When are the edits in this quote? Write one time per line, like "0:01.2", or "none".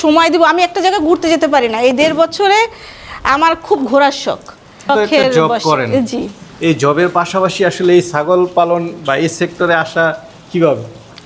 0:04.9